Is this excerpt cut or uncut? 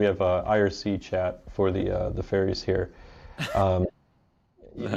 uncut